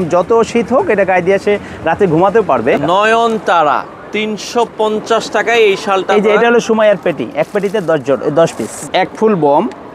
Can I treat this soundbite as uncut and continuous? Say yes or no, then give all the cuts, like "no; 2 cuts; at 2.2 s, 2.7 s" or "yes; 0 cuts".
no; 2 cuts; at 2.8 s, 8.7 s